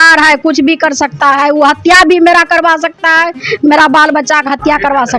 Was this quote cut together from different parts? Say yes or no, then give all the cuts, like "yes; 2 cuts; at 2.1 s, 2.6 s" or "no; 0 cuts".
no; 0 cuts